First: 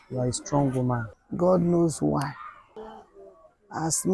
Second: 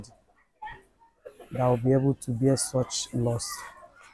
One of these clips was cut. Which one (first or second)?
first